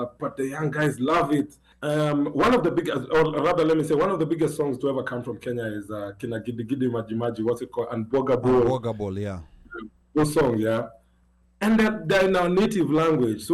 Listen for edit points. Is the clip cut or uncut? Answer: cut